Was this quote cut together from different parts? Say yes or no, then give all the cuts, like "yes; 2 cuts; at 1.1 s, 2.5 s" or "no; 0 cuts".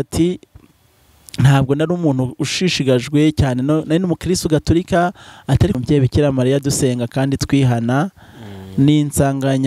yes; 1 cut; at 5.8 s